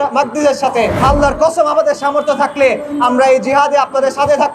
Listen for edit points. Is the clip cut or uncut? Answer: cut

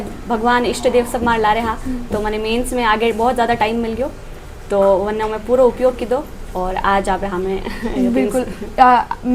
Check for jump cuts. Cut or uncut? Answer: uncut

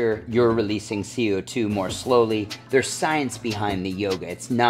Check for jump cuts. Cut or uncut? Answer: uncut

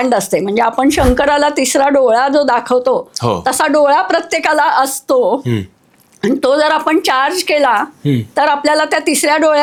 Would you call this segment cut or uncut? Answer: uncut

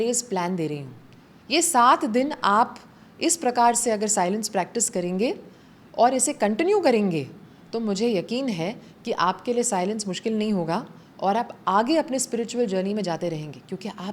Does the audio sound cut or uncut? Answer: uncut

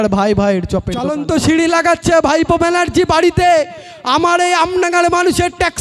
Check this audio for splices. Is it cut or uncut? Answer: cut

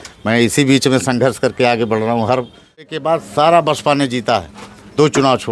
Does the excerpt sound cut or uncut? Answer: cut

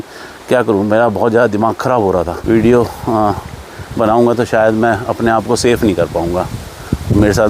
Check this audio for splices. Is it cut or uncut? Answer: cut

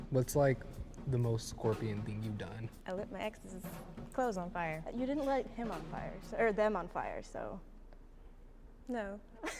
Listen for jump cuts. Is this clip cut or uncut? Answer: cut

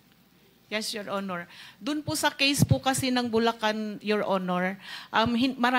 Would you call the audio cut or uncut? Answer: uncut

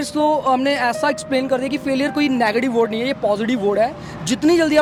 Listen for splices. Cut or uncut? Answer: uncut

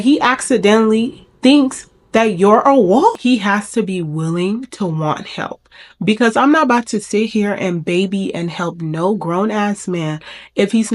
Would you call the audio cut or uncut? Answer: cut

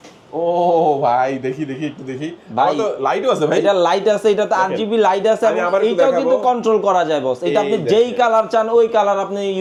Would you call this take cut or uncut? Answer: uncut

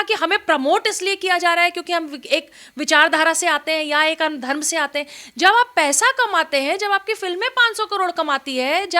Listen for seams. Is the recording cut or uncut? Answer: uncut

